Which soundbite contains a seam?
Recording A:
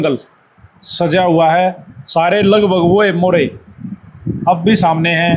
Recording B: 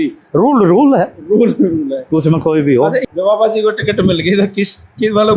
B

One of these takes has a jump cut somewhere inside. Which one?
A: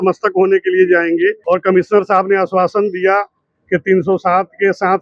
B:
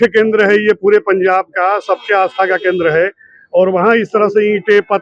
A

